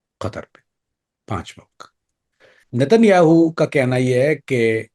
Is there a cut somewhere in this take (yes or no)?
no